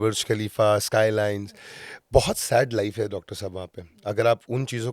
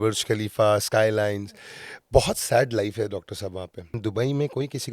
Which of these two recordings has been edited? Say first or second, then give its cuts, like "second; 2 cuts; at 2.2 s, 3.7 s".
second; 1 cut; at 3.8 s